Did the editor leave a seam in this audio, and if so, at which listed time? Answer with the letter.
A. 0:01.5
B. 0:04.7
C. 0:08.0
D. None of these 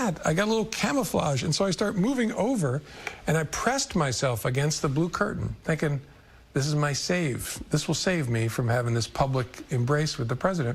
D